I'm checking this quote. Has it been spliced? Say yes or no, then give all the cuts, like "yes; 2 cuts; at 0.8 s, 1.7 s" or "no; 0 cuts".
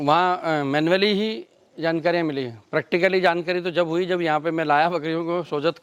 no; 0 cuts